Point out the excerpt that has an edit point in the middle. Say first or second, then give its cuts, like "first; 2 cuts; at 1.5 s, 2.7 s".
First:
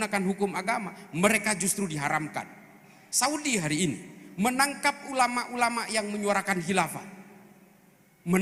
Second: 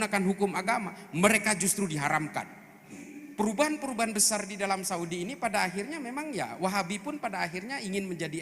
second; 1 cut; at 3.0 s